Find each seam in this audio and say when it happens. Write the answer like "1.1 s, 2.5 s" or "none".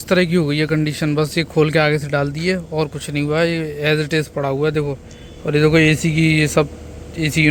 none

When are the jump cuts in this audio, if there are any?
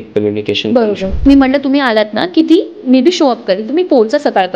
1.1 s

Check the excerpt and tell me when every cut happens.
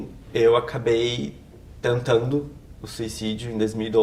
none

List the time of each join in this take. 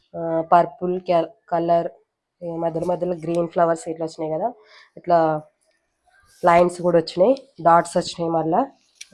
none

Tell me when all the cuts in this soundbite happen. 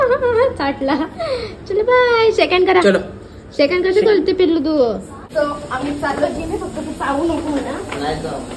5.7 s

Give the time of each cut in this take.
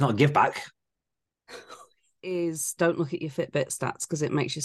2.1 s

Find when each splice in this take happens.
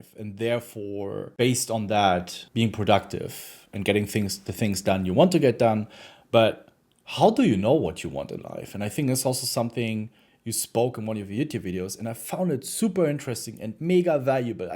1.3 s, 2.4 s

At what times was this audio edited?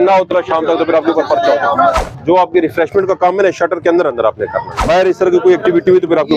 2.0 s, 4.7 s

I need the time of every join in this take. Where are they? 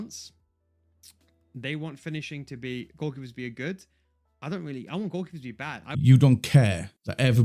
5.8 s

